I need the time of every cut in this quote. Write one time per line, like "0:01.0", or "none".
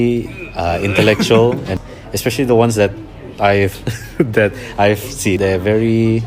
0:01.7
0:05.4